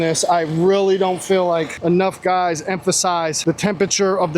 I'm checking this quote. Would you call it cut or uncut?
cut